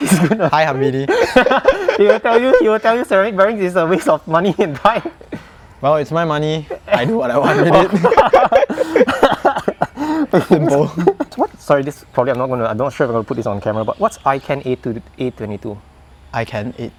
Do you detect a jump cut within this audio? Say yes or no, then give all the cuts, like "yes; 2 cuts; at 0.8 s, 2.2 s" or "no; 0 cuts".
no; 0 cuts